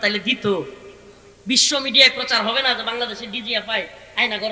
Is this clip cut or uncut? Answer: uncut